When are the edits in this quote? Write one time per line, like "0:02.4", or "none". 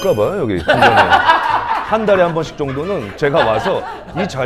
none

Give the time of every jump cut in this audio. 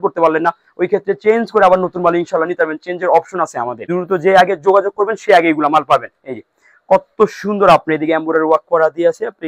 0:03.8

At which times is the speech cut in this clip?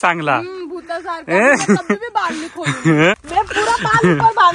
0:03.2

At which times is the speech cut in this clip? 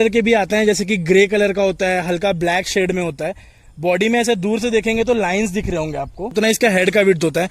0:06.3

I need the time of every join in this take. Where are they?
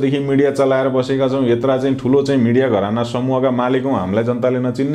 none

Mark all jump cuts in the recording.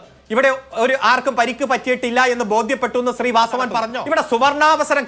0:03.8

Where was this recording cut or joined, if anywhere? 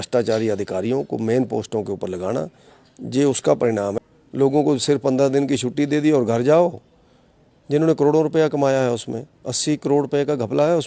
0:04.0

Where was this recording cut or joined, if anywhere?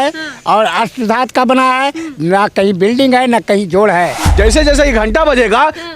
0:04.2

